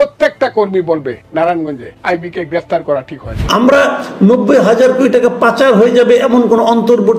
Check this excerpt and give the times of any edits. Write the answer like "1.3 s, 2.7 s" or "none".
3.4 s